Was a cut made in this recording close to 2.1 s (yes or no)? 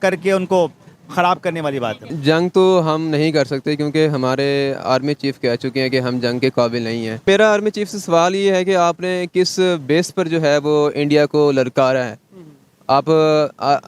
yes